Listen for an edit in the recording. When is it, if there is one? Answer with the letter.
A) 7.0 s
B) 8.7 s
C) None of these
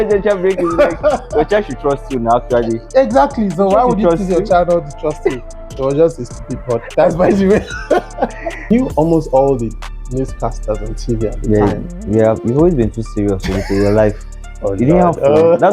B